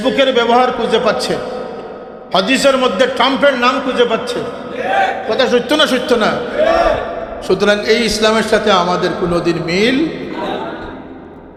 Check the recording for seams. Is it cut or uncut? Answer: uncut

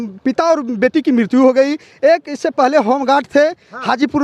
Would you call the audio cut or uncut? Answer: uncut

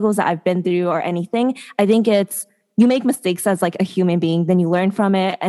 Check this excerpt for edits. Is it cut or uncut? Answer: uncut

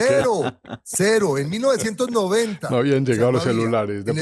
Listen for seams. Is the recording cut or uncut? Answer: uncut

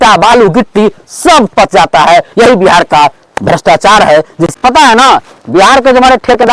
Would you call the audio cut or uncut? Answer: cut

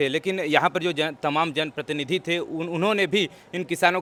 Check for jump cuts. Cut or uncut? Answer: uncut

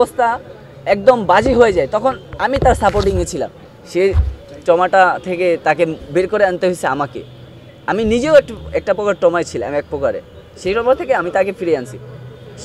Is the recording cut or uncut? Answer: cut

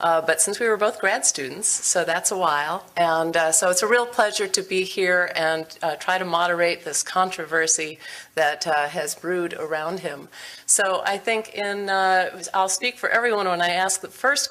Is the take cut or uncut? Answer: uncut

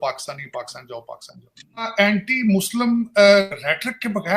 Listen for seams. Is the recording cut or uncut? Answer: cut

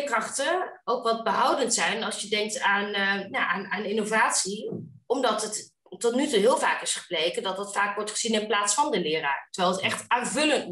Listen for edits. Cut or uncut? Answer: uncut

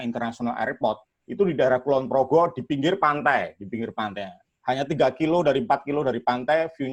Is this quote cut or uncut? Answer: uncut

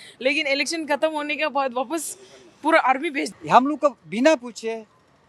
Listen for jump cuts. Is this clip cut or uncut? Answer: cut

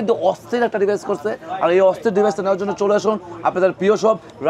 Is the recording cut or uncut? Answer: uncut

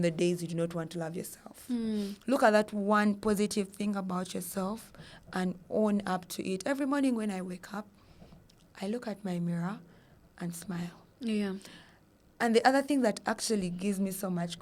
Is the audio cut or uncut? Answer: uncut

